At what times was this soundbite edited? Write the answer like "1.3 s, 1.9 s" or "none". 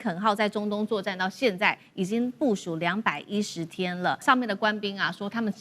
4.2 s